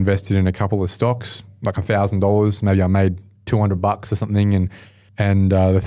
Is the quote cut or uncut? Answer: uncut